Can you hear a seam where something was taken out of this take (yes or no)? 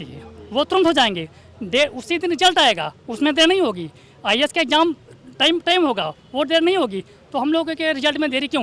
no